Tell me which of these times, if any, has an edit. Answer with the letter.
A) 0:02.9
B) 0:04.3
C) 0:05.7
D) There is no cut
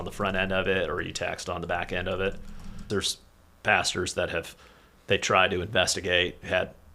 A